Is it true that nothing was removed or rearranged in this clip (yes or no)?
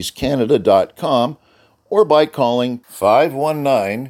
yes